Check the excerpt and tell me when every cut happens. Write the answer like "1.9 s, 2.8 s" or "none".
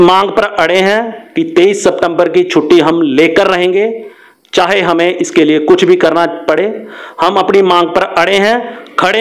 none